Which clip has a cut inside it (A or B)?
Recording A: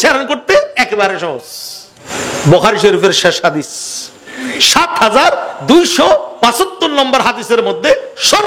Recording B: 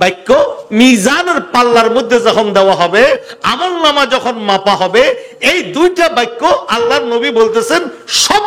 A